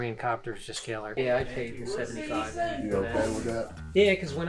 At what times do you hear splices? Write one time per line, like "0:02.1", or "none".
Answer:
0:01.1